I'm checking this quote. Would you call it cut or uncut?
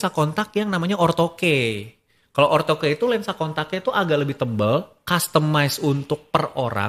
uncut